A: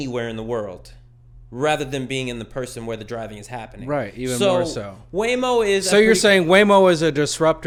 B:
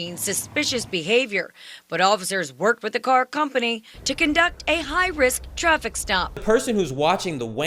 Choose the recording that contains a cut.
B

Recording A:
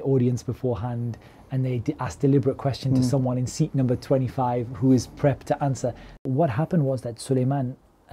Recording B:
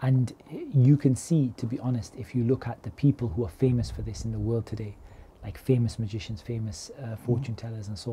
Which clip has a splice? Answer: A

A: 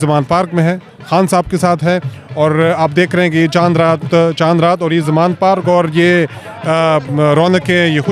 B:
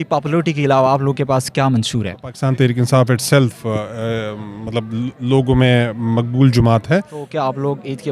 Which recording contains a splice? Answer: B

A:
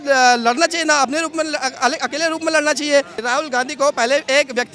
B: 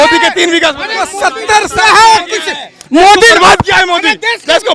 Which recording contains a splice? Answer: A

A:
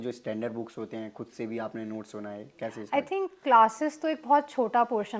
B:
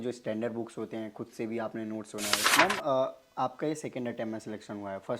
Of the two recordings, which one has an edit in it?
B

